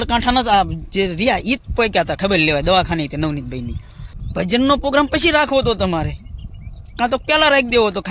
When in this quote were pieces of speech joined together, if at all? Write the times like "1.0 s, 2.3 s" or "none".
4.2 s